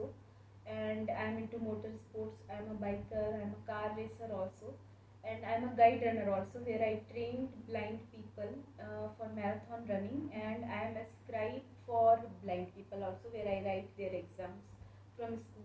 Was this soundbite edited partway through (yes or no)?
no